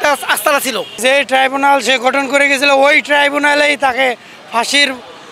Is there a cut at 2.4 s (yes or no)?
no